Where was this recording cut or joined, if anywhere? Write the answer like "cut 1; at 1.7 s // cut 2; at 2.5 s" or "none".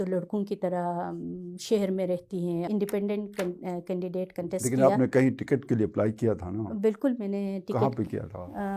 cut 1; at 2.7 s